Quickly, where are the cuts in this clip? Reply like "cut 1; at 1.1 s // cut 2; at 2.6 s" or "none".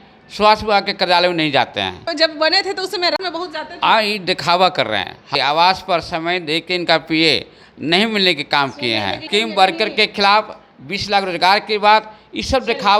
cut 1; at 2.0 s // cut 2; at 5.3 s // cut 3; at 9.2 s